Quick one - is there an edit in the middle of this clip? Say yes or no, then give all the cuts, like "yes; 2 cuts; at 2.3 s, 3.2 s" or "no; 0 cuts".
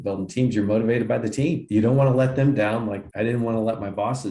yes; 2 cuts; at 1.6 s, 3.0 s